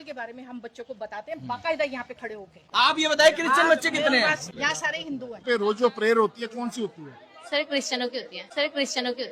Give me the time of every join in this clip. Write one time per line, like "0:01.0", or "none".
0:01.4
0:02.6
0:05.4